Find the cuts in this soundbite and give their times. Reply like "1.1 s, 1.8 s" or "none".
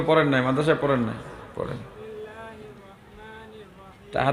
1.9 s